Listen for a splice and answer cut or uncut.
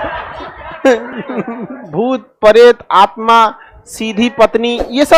cut